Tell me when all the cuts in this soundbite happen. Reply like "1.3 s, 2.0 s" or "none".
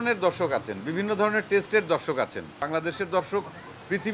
2.6 s